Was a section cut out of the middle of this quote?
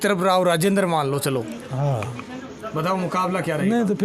no; 0 cuts

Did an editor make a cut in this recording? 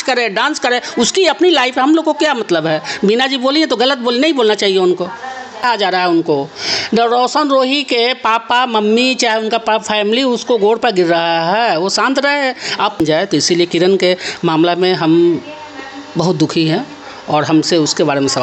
yes; 2 cuts; at 5.6 s, 13.0 s

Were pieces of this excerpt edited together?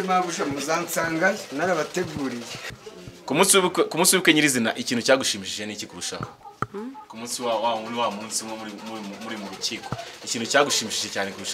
yes; 1 cut; at 2.6 s

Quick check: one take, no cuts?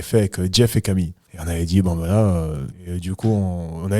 no; 1 cut; at 2.7 s

